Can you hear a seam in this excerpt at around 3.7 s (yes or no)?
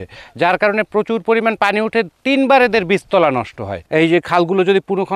yes